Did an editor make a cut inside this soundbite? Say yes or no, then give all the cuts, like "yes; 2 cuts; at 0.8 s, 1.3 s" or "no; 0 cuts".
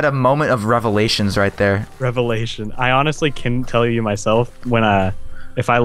no; 0 cuts